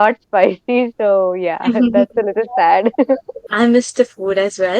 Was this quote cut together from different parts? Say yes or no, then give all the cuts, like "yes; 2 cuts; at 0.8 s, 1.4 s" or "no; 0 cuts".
yes; 1 cut; at 3.4 s